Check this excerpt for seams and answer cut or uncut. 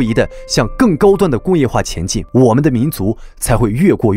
uncut